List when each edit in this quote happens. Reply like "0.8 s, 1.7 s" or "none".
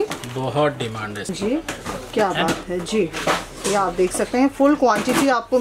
1.3 s